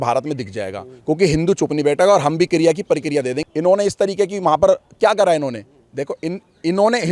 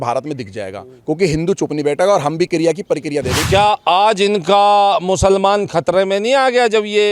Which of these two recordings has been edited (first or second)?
second